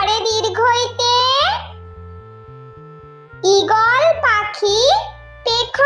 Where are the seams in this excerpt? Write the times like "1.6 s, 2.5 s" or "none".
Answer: 1.7 s, 3.4 s